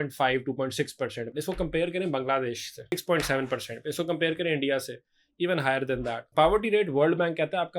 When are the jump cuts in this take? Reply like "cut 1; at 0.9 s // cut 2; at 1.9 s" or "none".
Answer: cut 1; at 1.2 s // cut 2; at 2.9 s // cut 3; at 6.2 s